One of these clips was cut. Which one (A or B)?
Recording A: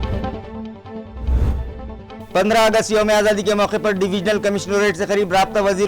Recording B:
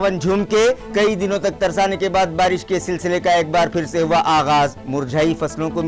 A